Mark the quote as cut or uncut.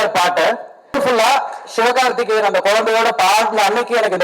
cut